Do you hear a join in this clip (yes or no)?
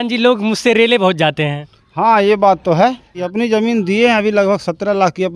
yes